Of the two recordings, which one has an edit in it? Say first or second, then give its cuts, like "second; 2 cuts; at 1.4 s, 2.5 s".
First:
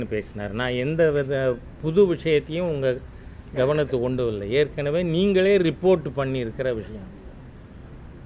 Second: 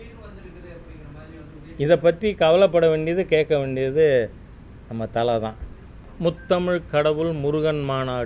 second; 1 cut; at 6.1 s